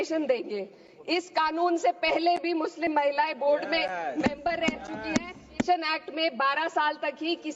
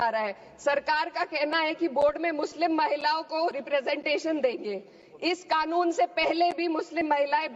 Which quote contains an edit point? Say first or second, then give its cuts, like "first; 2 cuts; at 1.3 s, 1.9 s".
first; 1 cut; at 5.7 s